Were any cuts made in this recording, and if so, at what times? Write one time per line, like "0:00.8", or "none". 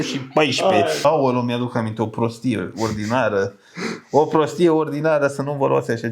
0:01.0